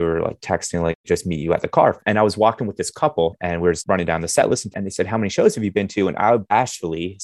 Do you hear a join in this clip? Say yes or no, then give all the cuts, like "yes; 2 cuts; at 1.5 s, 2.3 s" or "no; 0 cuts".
yes; 4 cuts; at 1.0 s, 2.0 s, 3.8 s, 4.8 s